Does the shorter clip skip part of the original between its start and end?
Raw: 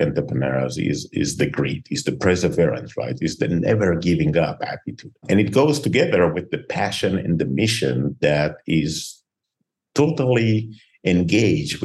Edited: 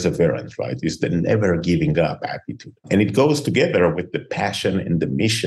no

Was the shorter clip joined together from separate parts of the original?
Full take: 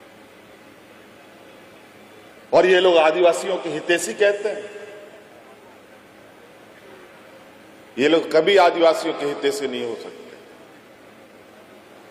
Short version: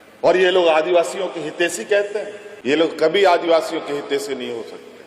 yes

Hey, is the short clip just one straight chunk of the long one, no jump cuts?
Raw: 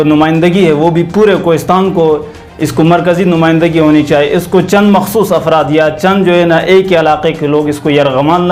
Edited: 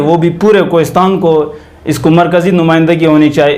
yes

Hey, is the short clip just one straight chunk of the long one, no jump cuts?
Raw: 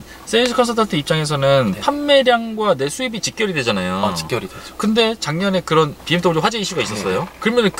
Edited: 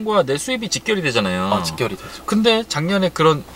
yes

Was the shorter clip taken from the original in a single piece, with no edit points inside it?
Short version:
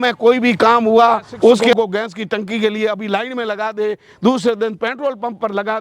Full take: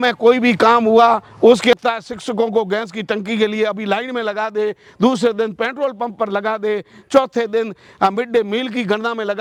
no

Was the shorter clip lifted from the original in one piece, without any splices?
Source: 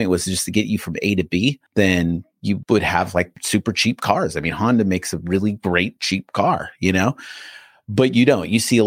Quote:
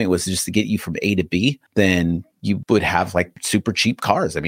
yes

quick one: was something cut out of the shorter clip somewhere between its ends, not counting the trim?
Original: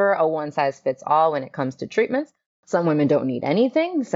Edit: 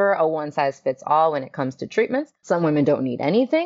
yes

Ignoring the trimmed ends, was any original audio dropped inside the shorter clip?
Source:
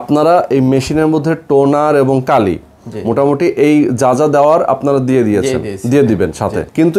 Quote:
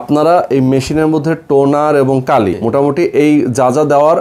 yes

